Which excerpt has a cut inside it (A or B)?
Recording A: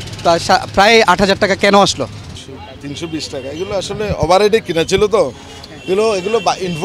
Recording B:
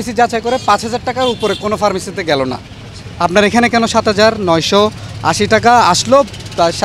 A